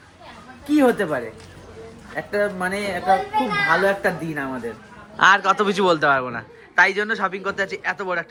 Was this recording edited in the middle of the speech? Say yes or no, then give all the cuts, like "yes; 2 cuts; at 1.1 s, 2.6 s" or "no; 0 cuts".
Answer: no; 0 cuts